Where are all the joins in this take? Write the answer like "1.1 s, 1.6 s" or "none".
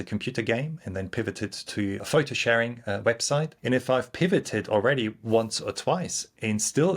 2.0 s, 3.5 s